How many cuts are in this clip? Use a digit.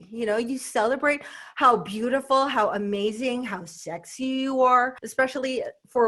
1